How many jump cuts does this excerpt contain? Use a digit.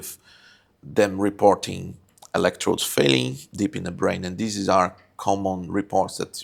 0